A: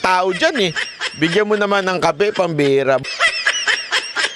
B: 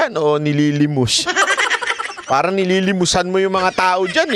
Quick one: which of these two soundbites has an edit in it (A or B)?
A